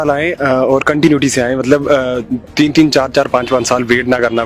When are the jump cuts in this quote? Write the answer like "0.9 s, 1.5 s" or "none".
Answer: none